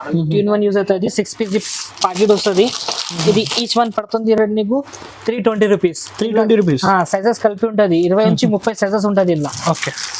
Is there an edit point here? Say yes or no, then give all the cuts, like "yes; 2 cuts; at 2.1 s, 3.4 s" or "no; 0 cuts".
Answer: no; 0 cuts